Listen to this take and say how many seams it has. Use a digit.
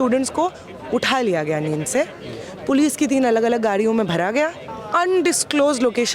1